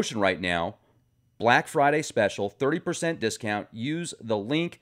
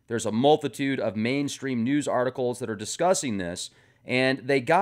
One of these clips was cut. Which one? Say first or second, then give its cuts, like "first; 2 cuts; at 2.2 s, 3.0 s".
second; 1 cut; at 2.2 s